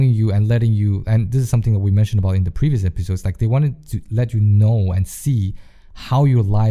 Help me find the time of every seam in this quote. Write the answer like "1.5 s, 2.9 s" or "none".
none